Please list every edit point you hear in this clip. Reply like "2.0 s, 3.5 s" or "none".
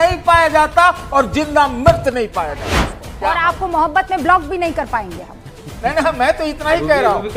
2.7 s